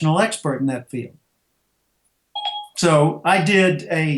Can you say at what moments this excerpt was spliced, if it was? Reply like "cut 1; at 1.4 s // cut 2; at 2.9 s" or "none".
none